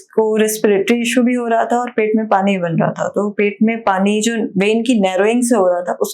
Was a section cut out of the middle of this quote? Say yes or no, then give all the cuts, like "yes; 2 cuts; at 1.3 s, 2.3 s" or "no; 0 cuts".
no; 0 cuts